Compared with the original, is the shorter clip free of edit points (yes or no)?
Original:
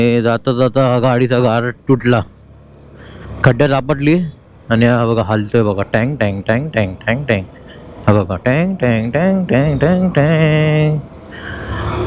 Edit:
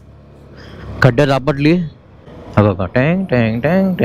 no